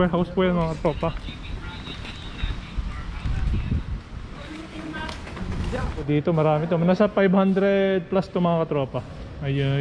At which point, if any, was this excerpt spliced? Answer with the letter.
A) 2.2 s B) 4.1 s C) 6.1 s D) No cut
C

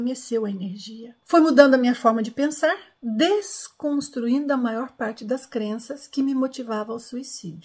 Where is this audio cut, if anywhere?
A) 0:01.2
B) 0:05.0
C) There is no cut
A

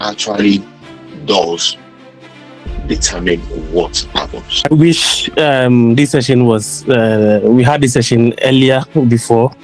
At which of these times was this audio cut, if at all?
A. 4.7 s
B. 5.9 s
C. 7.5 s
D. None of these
A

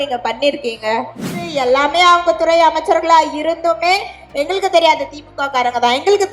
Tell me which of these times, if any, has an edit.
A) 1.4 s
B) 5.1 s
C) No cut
A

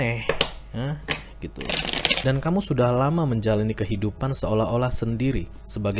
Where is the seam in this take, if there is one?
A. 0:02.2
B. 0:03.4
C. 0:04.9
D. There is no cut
A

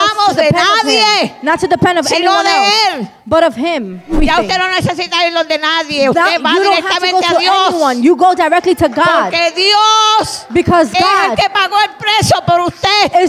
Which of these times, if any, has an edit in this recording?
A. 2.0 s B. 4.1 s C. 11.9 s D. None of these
B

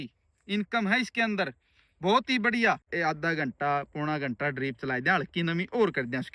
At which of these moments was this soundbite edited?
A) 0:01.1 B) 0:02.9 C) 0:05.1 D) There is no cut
B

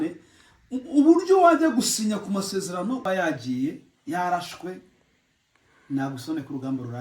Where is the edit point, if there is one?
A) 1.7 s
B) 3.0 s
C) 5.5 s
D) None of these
B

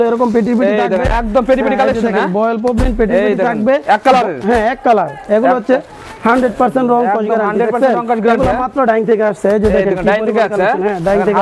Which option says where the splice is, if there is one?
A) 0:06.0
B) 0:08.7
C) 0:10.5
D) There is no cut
D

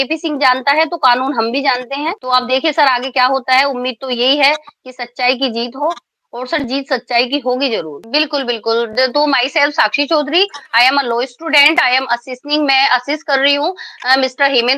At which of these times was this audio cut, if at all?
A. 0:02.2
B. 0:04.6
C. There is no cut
C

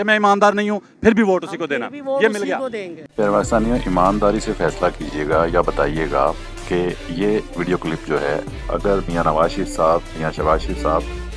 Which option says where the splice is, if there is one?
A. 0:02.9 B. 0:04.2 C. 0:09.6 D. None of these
A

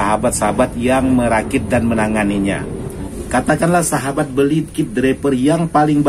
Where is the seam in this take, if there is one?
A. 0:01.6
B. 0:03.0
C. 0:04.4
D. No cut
B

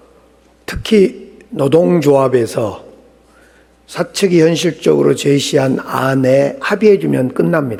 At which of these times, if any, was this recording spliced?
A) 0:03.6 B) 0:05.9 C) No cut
C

